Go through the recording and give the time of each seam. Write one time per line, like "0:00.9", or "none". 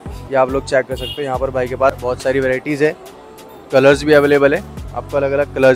0:02.0